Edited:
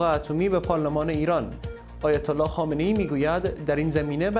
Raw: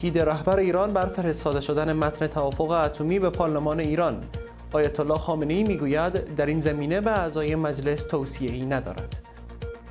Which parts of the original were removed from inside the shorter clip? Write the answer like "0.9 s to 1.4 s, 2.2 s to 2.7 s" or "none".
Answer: none